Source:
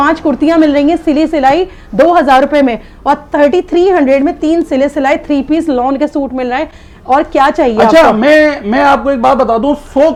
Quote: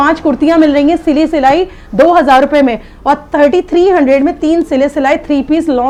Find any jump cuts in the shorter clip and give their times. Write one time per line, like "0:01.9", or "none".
none